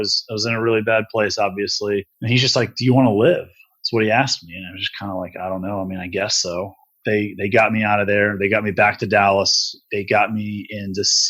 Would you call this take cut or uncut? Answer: cut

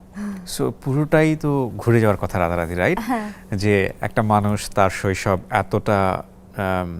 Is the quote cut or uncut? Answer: uncut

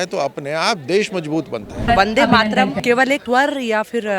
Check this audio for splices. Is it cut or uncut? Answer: cut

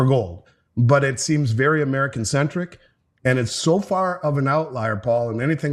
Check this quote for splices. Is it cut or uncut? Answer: uncut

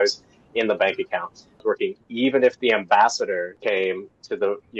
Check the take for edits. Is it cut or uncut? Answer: cut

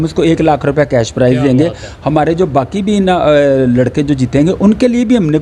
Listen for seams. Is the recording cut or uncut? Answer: uncut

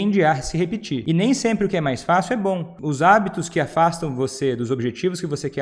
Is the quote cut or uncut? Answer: cut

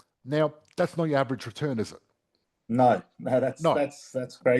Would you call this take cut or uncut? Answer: uncut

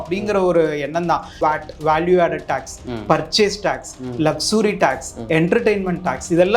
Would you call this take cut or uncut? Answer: cut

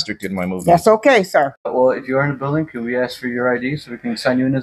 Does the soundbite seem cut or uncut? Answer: cut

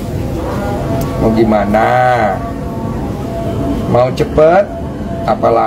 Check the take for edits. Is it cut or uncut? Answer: uncut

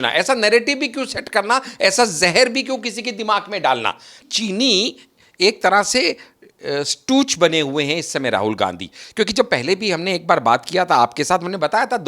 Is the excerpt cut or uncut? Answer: cut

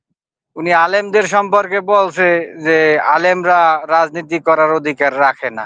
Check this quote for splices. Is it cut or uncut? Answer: uncut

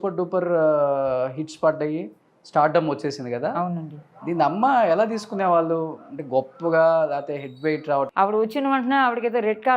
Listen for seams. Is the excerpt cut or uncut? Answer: cut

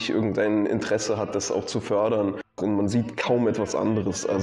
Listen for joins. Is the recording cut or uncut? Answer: cut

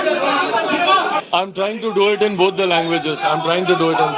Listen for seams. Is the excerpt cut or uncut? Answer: cut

